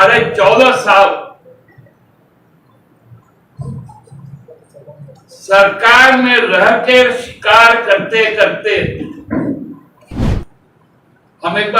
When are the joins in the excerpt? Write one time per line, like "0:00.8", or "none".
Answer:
0:10.4